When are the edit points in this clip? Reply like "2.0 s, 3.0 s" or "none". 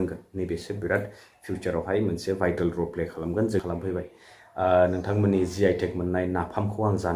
3.6 s